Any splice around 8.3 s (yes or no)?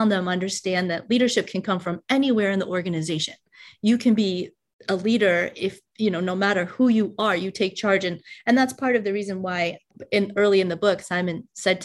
no